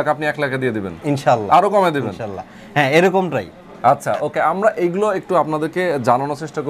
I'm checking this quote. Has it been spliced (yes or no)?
no